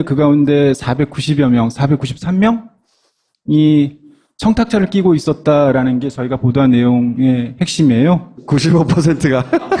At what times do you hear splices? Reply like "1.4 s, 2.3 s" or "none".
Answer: 4.1 s